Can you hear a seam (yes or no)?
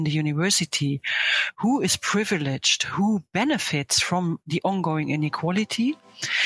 no